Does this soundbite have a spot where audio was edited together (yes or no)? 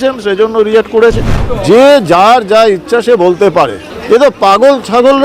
yes